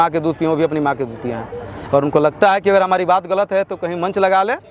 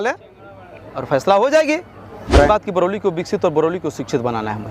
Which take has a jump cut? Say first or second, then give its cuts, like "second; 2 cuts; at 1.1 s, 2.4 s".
second; 1 cut; at 2.5 s